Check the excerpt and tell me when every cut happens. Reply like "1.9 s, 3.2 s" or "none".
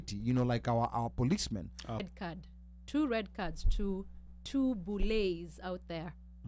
2.0 s